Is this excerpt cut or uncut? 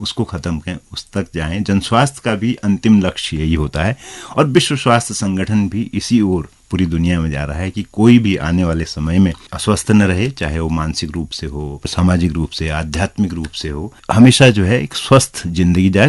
cut